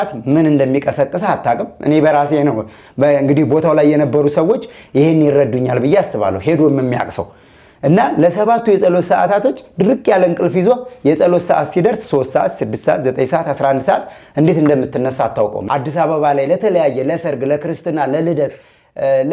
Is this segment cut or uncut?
cut